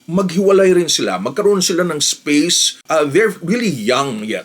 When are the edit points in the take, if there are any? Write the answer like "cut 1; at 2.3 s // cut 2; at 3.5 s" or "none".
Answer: cut 1; at 2.7 s